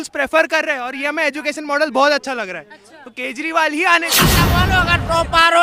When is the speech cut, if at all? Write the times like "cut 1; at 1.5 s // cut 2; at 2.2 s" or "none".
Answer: cut 1; at 4.3 s